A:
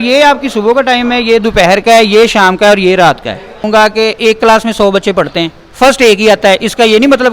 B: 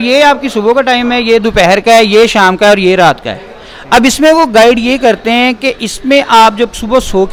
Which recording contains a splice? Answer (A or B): A